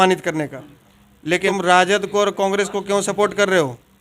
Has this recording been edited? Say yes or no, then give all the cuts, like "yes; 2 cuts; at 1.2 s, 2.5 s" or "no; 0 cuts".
yes; 1 cut; at 1.3 s